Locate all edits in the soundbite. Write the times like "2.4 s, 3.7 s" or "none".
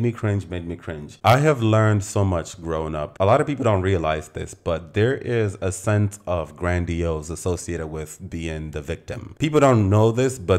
none

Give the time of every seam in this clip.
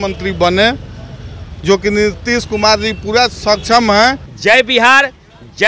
4.3 s

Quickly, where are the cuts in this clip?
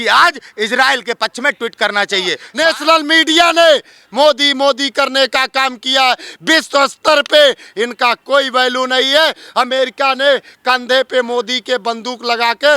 2.4 s

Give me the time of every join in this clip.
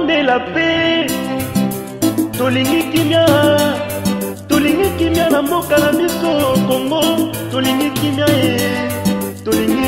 none

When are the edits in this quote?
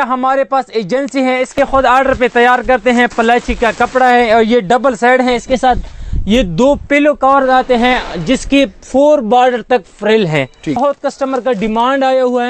1.5 s, 10.8 s

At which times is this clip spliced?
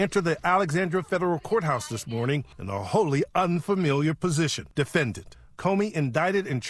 2.6 s, 4.6 s

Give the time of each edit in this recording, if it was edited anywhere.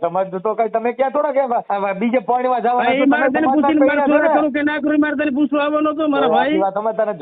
1.7 s

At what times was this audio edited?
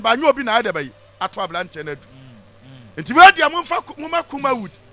none

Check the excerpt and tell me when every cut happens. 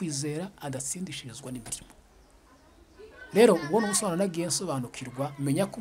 none

